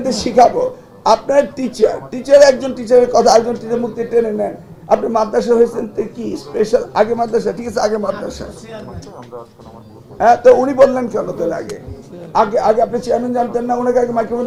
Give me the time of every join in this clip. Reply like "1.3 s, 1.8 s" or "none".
none